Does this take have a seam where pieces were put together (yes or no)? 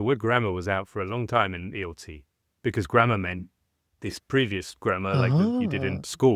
no